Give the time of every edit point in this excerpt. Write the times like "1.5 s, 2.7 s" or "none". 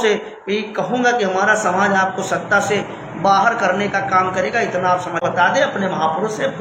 5.2 s